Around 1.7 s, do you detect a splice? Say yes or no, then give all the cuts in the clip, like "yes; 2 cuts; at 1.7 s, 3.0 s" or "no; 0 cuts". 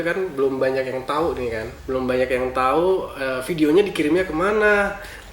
yes; 1 cut; at 1.7 s